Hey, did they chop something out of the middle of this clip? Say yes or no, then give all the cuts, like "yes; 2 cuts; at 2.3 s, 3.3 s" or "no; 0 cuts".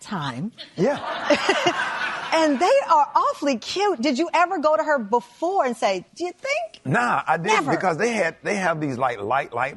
no; 0 cuts